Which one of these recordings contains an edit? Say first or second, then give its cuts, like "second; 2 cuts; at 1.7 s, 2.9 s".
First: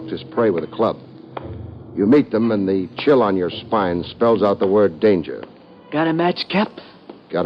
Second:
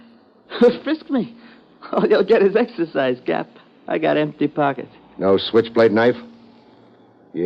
second; 1 cut; at 4.3 s